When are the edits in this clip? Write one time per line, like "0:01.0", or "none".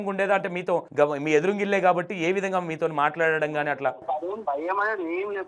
0:00.9
0:04.4